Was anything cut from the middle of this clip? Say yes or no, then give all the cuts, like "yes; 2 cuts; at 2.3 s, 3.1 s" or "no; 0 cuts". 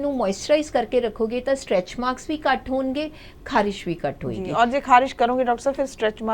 no; 0 cuts